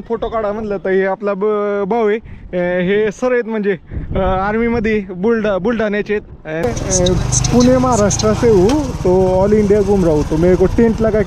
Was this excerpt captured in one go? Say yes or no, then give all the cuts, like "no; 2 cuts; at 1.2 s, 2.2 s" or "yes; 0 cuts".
no; 1 cut; at 6.6 s